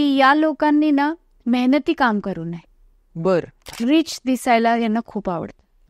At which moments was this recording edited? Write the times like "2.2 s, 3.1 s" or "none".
3.6 s

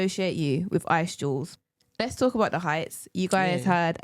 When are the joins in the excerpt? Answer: 1.5 s

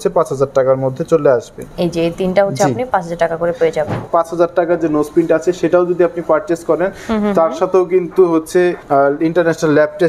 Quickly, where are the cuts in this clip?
1.6 s, 4.1 s, 8.8 s

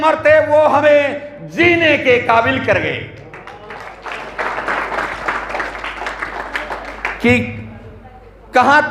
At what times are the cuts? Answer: none

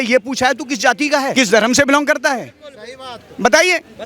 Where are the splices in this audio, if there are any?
1.3 s

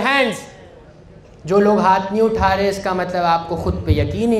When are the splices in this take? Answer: none

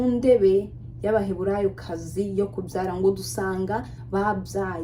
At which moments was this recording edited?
none

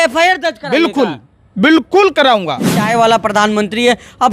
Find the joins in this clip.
2.8 s

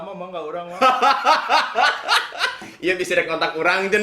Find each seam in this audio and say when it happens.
none

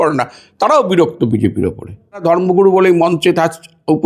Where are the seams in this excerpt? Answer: 2.2 s

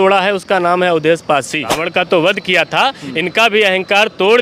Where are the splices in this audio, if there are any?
1.8 s

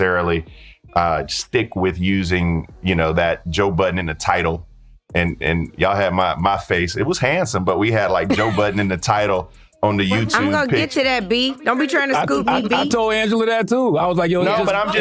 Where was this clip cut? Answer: none

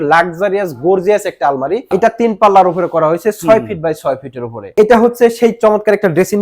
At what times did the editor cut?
1.9 s, 4.7 s

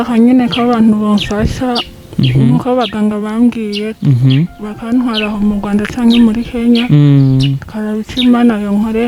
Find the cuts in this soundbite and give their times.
none

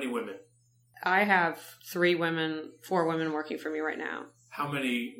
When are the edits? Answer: 0.9 s, 1.7 s

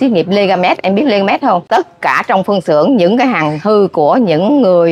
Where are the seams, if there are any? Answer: 1.6 s

